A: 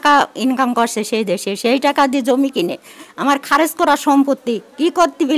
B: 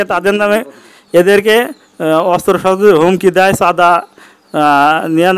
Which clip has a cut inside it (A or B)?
B